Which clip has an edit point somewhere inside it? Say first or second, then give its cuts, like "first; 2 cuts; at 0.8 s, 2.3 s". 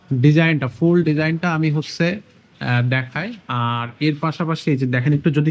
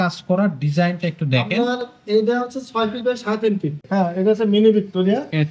second; 1 cut; at 3.8 s